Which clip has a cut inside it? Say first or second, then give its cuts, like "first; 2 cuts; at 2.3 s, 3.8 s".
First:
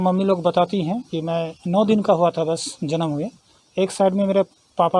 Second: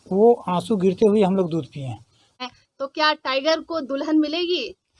second; 1 cut; at 2.3 s